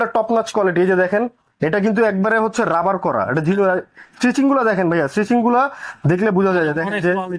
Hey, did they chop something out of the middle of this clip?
no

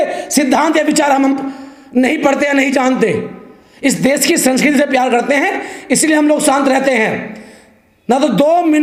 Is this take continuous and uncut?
yes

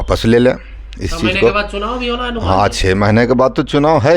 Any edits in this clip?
no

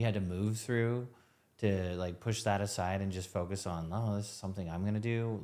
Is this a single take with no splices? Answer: yes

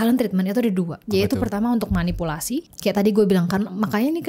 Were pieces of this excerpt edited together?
yes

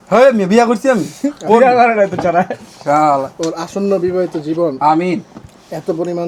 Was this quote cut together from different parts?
no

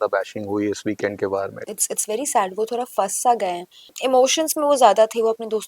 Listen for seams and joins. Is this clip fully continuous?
no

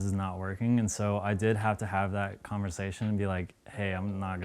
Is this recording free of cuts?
yes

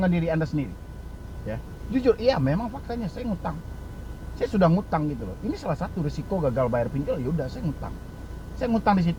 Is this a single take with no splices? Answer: yes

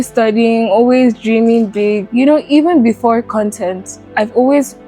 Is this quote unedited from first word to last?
no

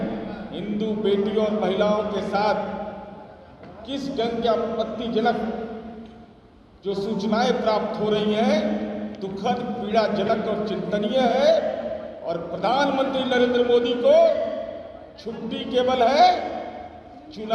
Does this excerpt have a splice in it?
no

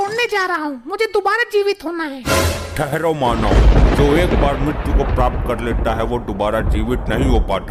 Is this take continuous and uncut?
yes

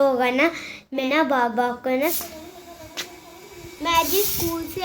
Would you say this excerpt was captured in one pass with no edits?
no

